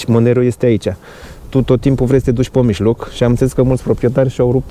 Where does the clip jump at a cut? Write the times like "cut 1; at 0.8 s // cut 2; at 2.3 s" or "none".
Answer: none